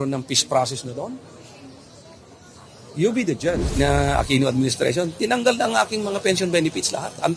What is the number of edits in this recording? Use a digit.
1